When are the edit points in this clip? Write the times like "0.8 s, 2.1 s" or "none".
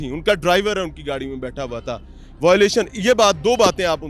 none